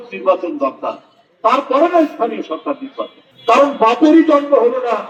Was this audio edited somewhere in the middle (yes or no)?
no